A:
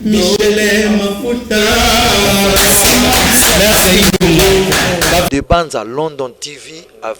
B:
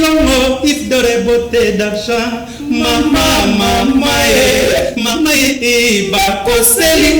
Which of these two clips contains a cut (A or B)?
A